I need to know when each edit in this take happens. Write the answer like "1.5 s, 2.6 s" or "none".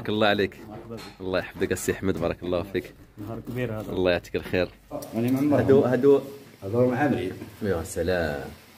5.0 s